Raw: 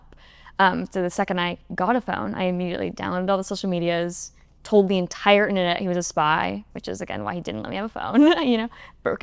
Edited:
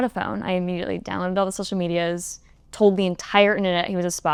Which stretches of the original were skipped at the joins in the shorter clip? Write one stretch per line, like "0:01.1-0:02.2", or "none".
none